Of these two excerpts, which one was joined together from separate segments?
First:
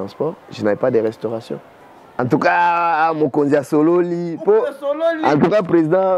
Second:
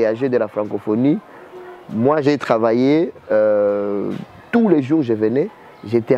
first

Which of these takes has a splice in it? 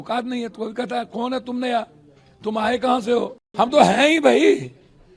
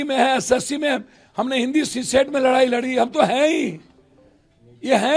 first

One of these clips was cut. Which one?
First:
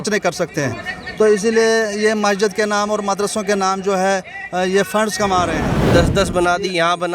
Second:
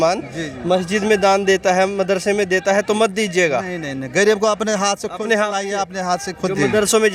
first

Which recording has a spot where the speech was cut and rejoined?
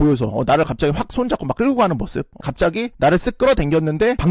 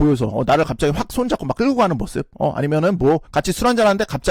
first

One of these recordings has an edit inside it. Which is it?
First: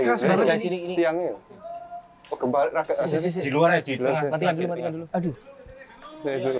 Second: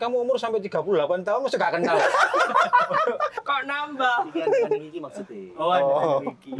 second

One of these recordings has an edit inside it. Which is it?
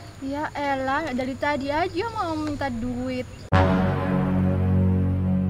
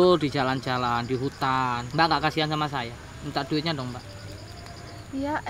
second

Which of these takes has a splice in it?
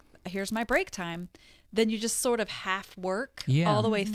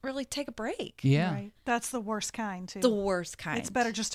second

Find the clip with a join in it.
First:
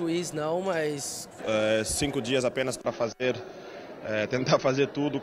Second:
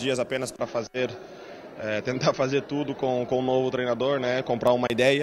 first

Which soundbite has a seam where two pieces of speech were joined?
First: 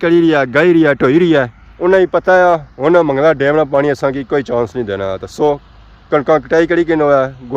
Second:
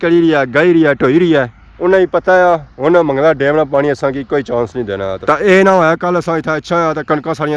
second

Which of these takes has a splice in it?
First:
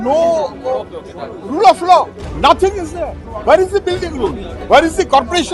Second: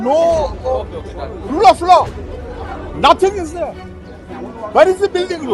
first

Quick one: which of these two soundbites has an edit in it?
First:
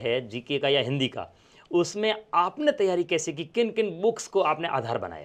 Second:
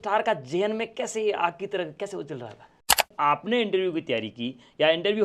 second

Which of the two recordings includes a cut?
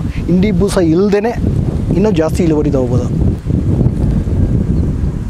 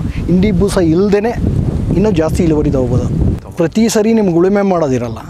second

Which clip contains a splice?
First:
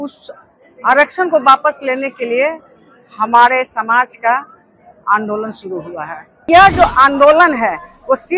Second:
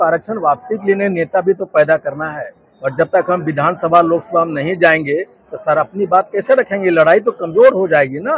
first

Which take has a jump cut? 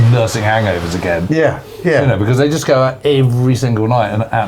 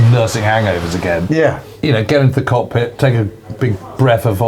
second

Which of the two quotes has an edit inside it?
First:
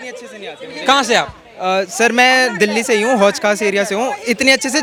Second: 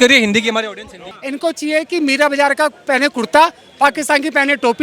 second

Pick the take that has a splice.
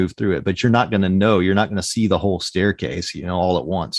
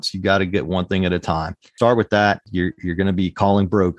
second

